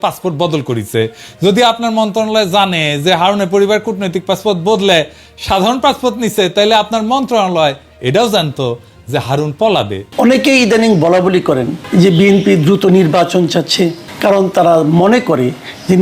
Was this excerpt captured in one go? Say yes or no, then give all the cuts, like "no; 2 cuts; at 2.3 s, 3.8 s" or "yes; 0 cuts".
no; 3 cuts; at 10.0 s, 11.8 s, 14.1 s